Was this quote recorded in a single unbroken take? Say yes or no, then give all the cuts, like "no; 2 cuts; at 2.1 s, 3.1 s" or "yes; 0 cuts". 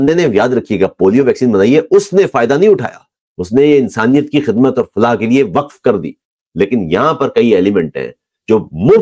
yes; 0 cuts